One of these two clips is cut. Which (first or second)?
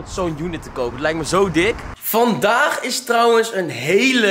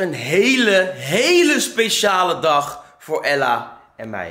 first